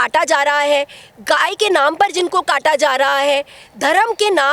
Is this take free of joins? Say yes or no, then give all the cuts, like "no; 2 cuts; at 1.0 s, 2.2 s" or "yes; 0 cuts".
yes; 0 cuts